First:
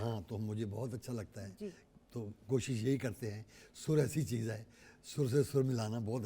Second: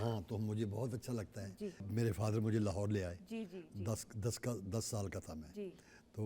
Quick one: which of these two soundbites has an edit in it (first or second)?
second